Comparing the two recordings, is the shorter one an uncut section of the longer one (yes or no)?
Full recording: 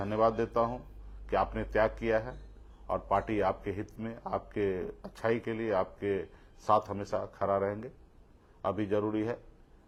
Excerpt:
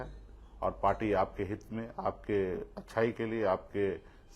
yes